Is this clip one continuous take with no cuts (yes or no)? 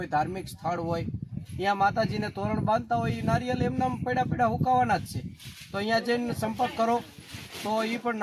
yes